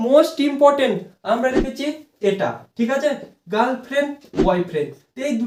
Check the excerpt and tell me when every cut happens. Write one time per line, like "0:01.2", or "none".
none